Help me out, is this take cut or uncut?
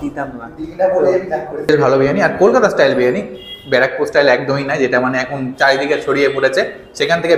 cut